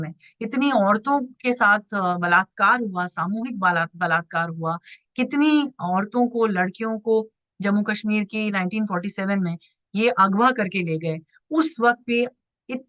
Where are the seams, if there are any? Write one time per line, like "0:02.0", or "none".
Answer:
none

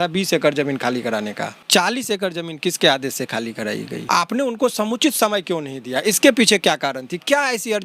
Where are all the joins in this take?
0:01.7
0:04.0

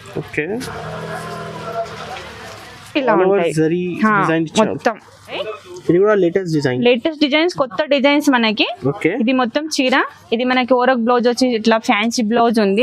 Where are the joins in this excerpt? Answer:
0:05.5

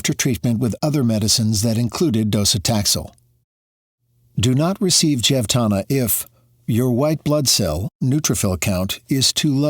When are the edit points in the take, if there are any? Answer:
0:03.6

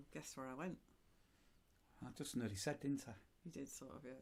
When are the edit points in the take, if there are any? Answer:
none

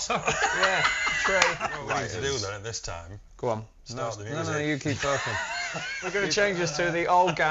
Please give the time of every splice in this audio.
0:01.8
0:06.0

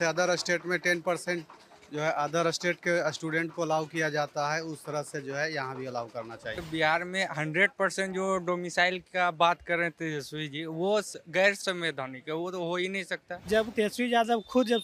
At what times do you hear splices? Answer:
0:06.6
0:11.6
0:13.7

